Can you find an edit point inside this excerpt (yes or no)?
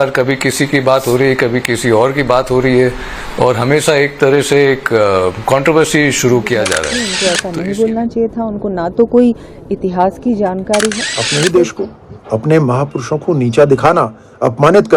yes